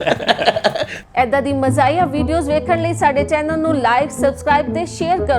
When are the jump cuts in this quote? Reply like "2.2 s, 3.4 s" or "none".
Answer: 0.9 s